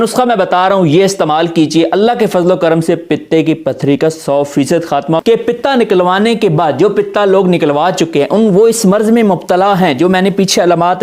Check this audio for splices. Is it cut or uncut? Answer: cut